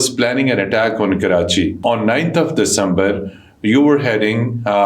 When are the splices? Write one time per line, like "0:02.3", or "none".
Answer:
0:01.8